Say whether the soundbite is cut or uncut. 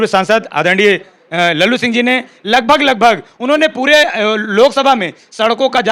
uncut